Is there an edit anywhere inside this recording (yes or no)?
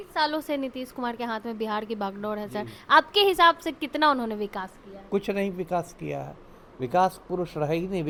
no